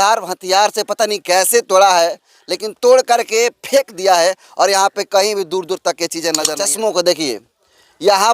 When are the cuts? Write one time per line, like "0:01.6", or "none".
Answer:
0:06.4